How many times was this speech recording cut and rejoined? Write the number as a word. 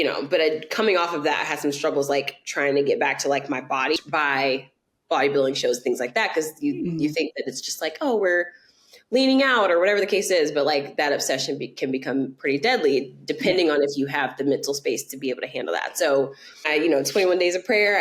two